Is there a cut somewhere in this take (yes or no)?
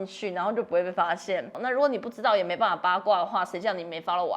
yes